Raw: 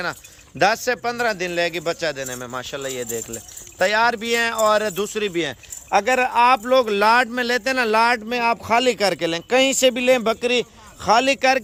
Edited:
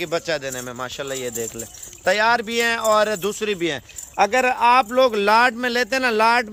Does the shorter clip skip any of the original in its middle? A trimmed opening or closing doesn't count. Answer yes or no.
no